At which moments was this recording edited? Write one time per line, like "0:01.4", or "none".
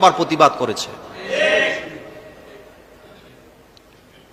none